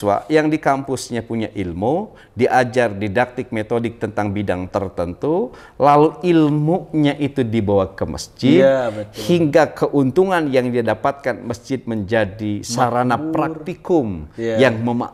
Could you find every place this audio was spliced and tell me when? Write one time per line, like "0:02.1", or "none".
none

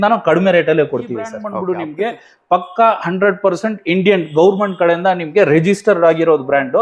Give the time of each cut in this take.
0:01.4

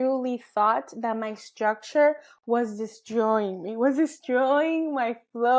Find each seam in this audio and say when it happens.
none

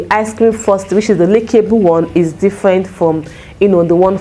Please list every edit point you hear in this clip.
none

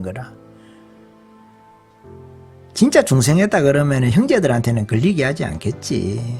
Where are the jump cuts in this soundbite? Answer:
none

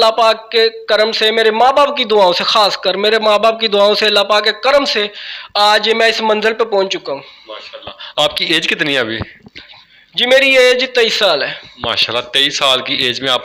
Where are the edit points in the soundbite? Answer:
none

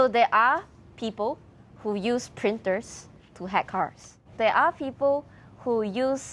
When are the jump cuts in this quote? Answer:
0:04.3

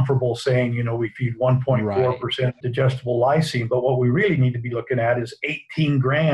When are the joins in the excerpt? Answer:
0:02.6

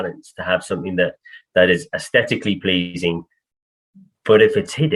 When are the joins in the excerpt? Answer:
none

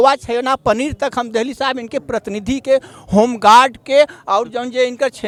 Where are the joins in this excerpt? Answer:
none

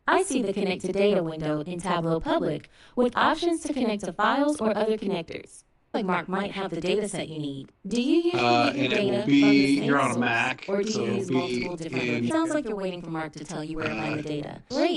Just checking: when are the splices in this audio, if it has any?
0:05.9
0:12.3

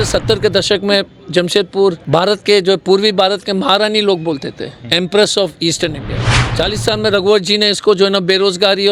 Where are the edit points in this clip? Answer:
none

